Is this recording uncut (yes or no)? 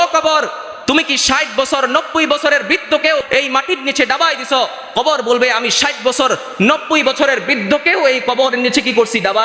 no